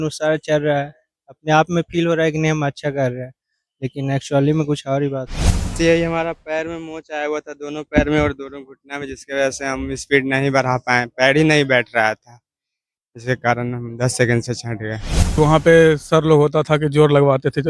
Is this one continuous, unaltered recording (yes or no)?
no